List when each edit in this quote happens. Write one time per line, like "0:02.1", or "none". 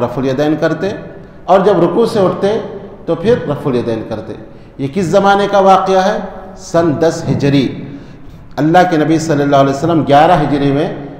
none